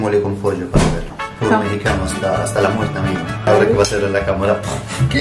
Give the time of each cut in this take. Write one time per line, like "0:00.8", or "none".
0:01.2
0:03.4

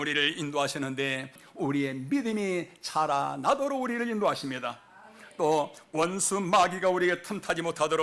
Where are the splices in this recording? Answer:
0:01.4

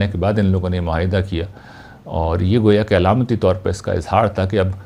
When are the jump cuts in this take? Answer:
none

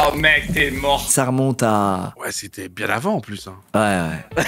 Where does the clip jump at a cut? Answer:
0:01.1
0:02.2

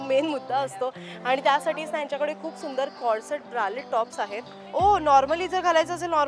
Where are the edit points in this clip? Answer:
0:04.5

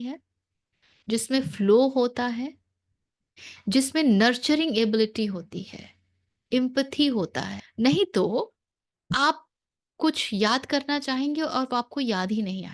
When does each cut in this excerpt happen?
0:07.6

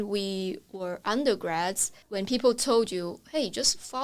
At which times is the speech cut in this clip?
0:02.0

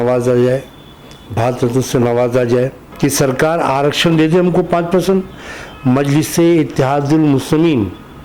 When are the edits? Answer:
0:02.8

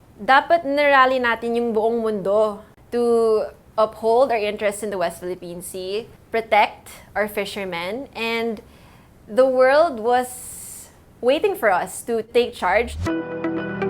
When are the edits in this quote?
0:13.0

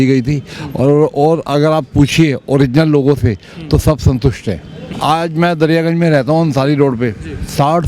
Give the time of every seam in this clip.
0:04.8

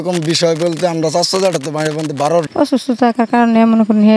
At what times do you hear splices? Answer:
0:02.5

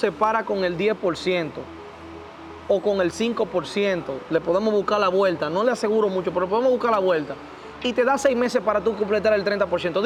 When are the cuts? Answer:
none

